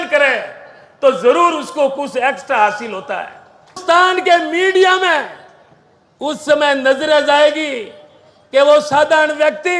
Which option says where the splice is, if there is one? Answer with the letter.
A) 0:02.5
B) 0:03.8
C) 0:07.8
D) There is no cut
B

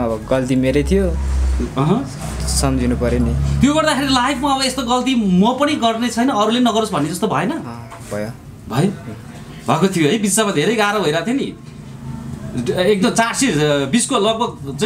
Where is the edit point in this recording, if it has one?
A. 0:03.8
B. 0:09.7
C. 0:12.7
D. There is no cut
D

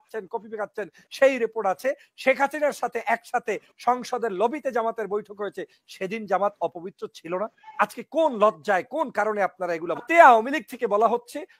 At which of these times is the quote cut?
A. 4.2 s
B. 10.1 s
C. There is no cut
B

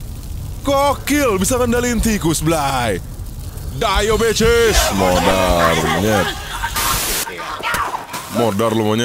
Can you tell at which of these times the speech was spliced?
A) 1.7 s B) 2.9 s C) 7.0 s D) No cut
C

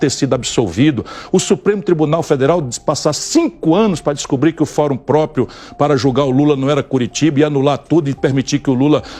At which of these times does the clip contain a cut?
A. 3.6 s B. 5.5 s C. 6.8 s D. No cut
D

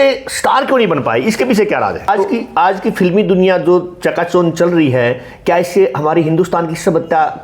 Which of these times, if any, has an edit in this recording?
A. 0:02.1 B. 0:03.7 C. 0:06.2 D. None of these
A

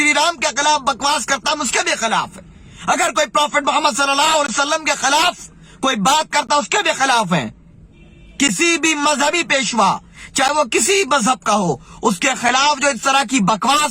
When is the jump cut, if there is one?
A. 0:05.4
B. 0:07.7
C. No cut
C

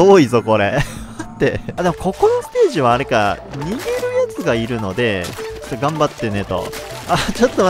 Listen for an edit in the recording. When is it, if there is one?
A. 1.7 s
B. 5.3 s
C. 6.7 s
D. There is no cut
A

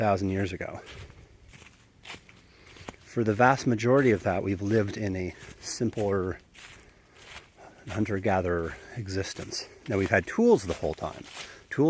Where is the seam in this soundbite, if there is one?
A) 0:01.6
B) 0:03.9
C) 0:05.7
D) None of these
D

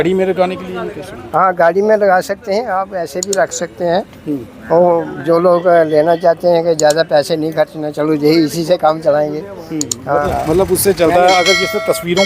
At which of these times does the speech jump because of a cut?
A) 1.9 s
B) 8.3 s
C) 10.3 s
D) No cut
C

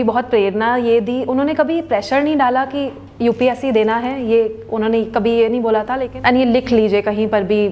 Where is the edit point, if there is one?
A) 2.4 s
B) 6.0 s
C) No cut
B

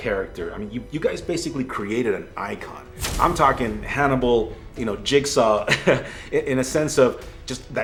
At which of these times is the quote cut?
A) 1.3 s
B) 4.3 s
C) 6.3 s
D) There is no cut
D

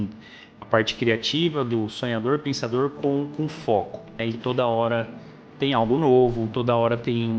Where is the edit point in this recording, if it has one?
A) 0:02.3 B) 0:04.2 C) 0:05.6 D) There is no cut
B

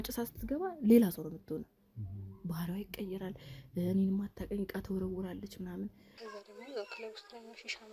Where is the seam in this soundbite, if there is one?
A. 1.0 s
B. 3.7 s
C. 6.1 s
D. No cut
C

